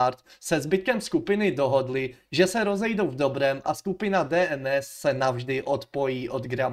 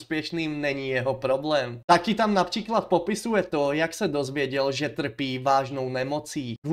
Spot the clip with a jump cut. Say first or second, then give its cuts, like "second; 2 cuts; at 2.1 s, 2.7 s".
second; 1 cut; at 1.8 s